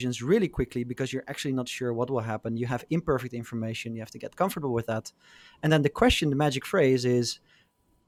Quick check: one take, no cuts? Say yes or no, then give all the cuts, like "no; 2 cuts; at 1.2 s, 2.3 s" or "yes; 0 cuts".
yes; 0 cuts